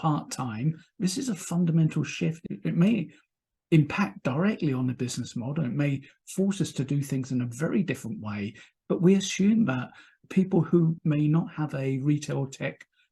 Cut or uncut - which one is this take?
cut